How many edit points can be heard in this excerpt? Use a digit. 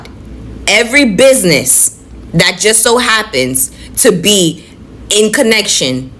0